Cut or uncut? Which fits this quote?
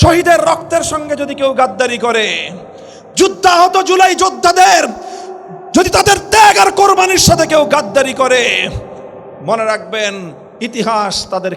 uncut